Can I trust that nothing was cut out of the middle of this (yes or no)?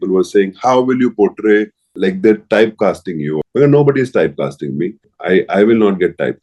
no